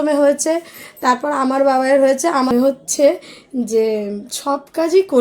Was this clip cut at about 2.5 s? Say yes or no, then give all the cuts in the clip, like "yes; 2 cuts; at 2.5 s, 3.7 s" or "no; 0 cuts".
yes; 1 cut; at 2.5 s